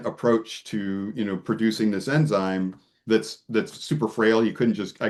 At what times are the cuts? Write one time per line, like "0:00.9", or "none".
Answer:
none